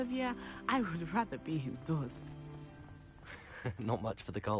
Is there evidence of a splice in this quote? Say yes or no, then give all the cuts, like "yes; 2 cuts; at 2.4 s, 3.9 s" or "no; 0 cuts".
yes; 2 cuts; at 2.1 s, 3.4 s